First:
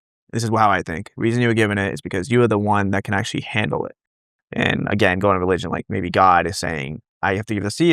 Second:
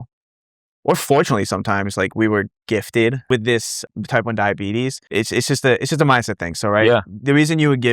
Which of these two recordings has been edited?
second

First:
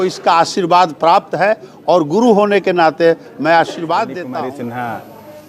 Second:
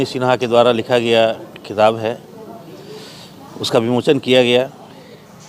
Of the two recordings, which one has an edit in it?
first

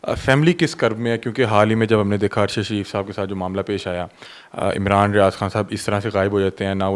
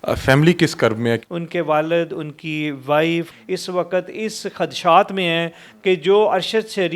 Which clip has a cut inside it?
second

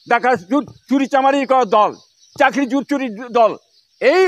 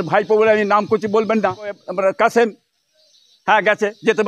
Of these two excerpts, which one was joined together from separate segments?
second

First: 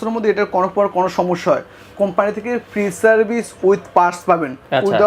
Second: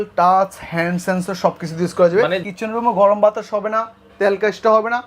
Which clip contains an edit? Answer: second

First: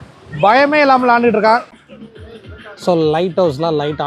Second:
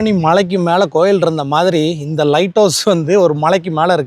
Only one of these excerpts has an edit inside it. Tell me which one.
first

